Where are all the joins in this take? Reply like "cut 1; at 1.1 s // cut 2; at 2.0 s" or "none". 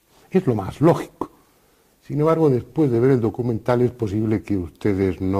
none